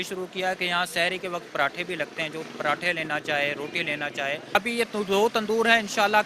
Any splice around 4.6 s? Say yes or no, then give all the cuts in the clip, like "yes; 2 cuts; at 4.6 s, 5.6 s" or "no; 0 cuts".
yes; 1 cut; at 4.6 s